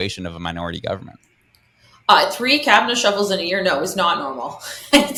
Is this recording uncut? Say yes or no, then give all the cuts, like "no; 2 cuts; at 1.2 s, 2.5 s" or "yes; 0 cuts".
yes; 0 cuts